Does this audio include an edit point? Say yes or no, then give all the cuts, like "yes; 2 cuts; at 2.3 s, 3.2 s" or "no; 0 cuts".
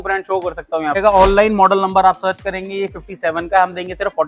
yes; 1 cut; at 1.0 s